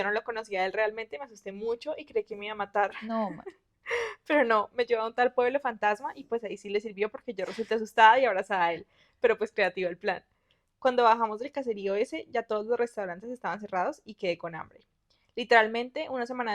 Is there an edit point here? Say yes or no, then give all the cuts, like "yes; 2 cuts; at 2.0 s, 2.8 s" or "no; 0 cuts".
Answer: no; 0 cuts